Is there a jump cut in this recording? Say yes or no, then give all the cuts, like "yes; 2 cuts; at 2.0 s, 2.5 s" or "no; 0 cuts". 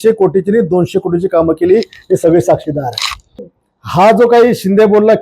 yes; 1 cut; at 3.6 s